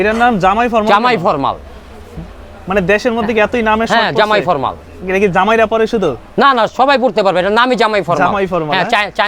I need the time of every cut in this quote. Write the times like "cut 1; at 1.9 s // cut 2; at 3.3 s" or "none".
none